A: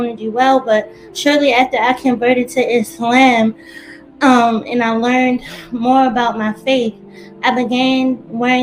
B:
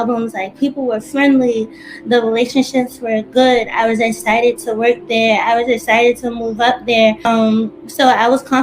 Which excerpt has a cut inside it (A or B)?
B